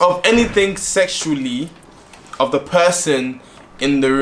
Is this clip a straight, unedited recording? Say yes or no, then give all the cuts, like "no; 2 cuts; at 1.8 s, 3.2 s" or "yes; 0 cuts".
yes; 0 cuts